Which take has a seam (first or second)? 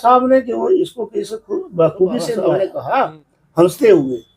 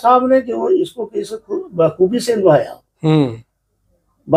first